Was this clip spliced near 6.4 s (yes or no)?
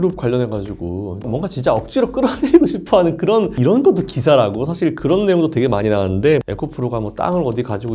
yes